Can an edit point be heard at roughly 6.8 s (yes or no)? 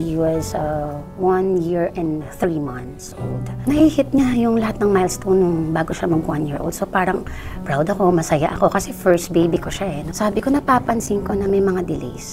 no